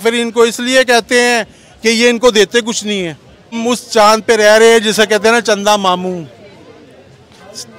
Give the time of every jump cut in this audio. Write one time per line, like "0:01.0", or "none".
0:03.6